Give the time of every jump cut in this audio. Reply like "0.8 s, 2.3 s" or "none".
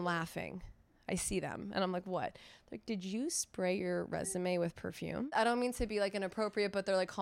5.3 s